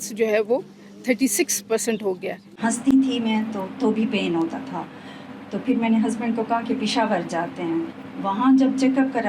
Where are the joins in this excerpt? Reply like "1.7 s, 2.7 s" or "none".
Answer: 2.5 s